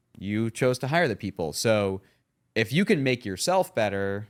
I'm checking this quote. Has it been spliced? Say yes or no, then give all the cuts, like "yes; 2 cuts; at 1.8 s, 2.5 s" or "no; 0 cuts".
no; 0 cuts